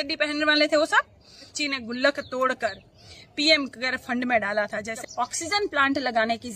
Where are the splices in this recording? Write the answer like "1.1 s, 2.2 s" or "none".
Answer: 1.5 s, 4.9 s